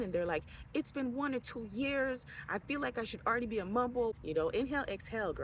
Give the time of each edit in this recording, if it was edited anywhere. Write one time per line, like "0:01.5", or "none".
0:04.1

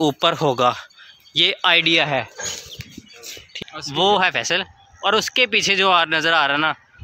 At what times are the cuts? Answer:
0:03.5

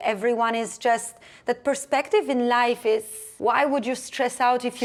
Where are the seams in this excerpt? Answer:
none

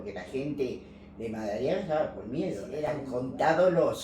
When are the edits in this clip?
0:03.0

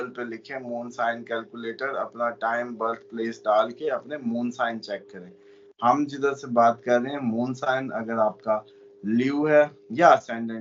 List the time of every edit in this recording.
none

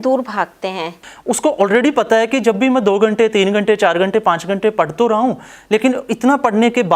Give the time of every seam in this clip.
0:01.1

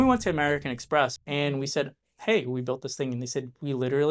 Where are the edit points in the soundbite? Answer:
0:01.2

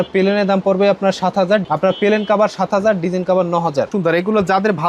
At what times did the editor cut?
0:01.6
0:03.9

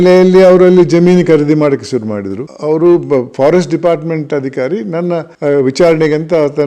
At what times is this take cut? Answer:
0:02.5
0:05.3

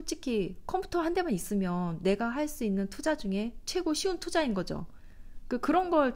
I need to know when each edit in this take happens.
none

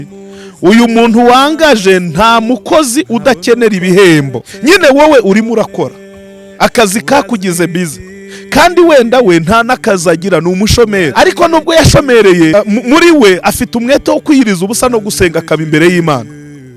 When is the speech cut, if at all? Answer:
0:04.4
0:11.1
0:12.5

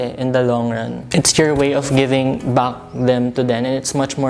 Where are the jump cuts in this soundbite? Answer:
0:01.0

